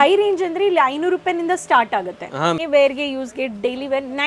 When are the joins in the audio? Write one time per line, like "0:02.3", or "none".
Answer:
0:02.6